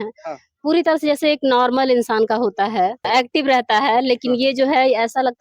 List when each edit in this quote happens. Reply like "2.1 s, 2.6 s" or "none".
3.0 s